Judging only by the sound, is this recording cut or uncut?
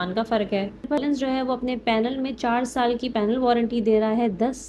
cut